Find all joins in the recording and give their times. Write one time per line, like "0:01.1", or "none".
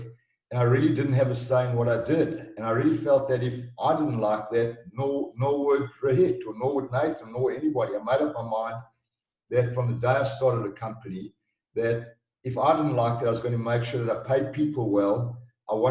none